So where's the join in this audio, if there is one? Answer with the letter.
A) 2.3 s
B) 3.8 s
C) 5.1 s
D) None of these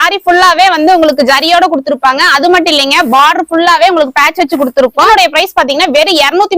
C